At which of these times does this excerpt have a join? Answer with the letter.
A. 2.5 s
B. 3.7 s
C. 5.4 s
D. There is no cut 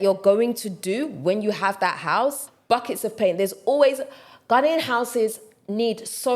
A